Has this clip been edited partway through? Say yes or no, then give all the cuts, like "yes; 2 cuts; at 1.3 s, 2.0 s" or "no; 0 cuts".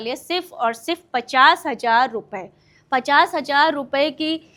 no; 0 cuts